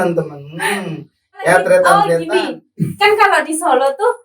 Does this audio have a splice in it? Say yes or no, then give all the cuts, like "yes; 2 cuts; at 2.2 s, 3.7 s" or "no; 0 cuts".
yes; 1 cut; at 2.1 s